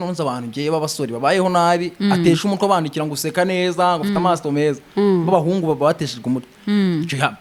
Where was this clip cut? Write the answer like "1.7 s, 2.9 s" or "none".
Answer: none